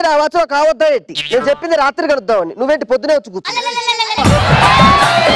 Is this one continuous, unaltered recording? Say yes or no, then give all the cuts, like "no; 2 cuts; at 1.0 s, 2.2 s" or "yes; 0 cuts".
no; 1 cut; at 4.2 s